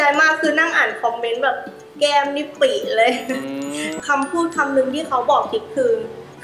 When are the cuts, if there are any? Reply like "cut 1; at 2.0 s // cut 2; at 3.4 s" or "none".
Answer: cut 1; at 4.0 s